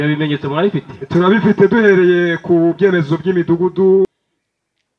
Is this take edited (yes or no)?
yes